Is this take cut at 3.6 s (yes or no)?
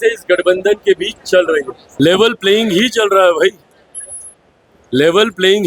no